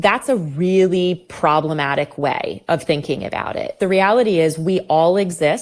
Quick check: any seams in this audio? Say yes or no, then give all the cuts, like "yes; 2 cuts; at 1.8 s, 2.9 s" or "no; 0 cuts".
yes; 1 cut; at 3.7 s